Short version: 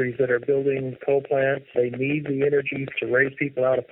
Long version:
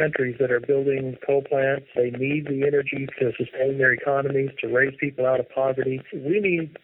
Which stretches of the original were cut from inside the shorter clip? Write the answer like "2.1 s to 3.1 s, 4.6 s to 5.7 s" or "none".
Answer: 3.1 s to 4.5 s